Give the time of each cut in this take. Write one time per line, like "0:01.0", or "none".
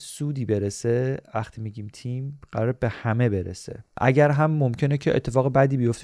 0:03.9